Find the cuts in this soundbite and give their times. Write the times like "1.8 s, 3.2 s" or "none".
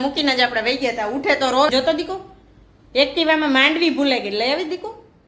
1.7 s